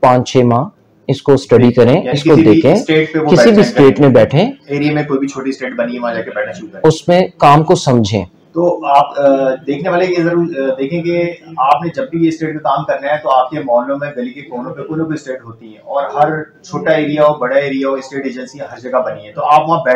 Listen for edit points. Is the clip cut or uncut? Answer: uncut